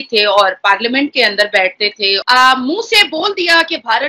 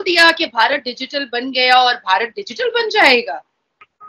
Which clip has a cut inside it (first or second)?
first